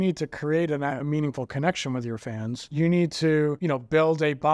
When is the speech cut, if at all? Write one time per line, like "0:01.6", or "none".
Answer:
0:02.6
0:03.6

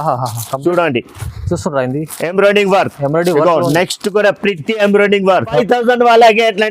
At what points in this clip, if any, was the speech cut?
0:05.5

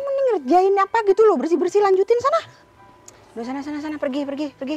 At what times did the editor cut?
0:02.5

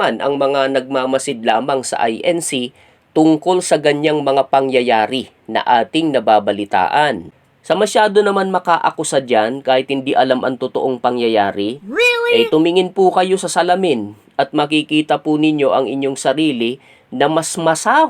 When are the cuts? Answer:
0:07.3

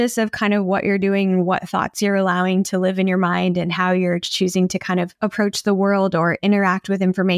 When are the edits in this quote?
none

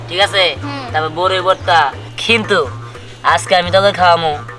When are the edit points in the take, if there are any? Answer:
0:02.1

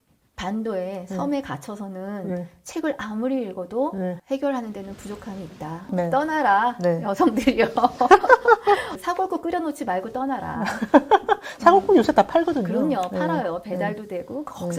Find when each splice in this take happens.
0:04.2
0:08.9

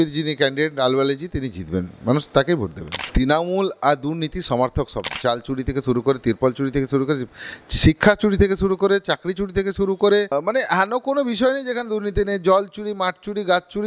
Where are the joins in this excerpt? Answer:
0:03.1
0:05.1
0:10.3

